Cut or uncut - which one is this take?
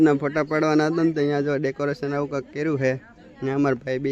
uncut